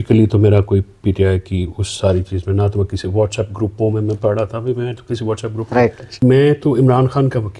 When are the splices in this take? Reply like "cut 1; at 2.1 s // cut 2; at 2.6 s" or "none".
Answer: cut 1; at 6.0 s